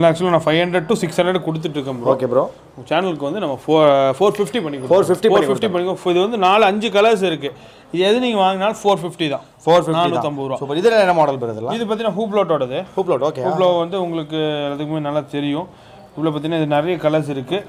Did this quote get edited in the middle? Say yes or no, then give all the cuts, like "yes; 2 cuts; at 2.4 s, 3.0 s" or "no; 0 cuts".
no; 0 cuts